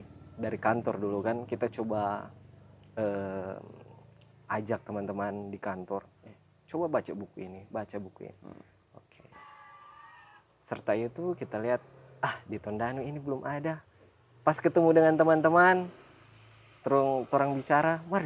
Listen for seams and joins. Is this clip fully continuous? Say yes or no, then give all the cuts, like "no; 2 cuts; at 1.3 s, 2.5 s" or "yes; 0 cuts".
yes; 0 cuts